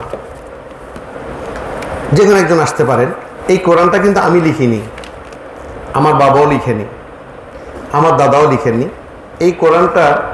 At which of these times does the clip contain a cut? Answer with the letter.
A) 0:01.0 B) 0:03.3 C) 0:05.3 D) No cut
B